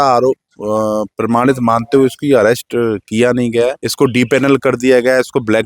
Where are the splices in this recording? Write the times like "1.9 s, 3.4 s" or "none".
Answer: 3.8 s